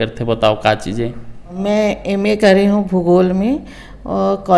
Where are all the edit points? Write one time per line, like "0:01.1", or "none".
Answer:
0:01.6